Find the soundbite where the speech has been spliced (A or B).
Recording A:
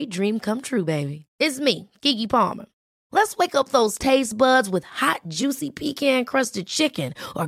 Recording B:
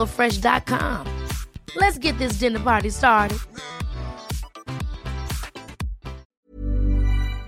B